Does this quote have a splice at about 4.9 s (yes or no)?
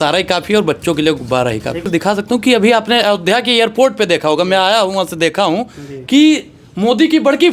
no